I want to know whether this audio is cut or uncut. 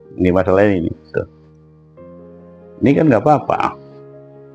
uncut